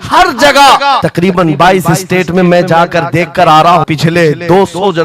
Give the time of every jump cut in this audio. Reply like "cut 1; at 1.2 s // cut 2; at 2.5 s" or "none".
cut 1; at 1.0 s // cut 2; at 3.9 s